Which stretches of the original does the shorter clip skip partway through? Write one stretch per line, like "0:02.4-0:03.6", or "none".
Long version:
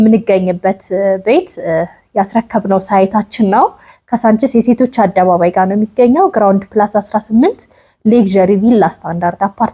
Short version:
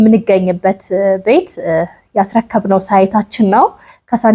none